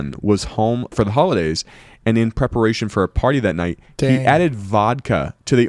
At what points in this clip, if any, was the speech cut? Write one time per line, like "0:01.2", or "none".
none